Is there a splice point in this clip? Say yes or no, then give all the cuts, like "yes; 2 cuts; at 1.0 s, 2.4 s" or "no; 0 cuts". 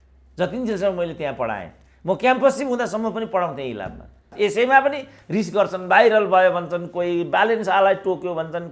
yes; 1 cut; at 4.3 s